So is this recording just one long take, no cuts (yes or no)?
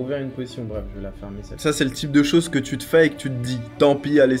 no